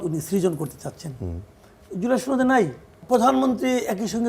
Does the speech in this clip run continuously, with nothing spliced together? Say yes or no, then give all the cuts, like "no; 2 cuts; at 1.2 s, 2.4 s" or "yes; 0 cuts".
no; 1 cut; at 3.0 s